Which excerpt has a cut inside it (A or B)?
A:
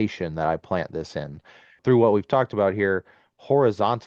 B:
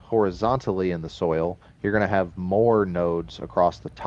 A